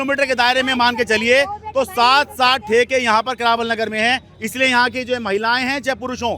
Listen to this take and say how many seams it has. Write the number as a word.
zero